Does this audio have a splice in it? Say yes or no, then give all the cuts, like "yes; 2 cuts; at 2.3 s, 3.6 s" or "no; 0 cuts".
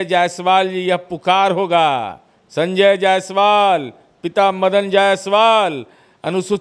no; 0 cuts